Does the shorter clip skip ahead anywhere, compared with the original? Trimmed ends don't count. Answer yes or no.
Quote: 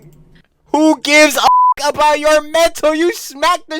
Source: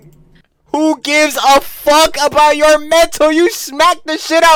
yes